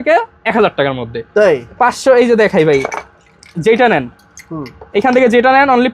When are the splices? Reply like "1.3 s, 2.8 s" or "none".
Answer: none